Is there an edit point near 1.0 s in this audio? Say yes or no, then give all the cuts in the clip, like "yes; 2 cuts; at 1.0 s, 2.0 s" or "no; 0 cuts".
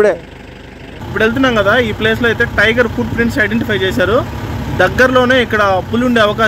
yes; 1 cut; at 1.0 s